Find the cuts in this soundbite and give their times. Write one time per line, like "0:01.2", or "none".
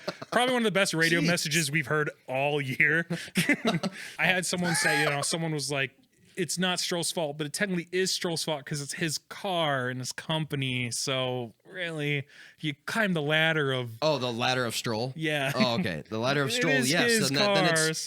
0:04.1